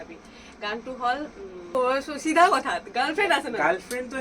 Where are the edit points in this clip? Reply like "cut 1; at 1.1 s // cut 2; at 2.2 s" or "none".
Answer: cut 1; at 1.8 s